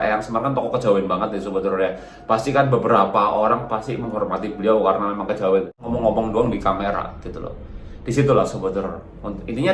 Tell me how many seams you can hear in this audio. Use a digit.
1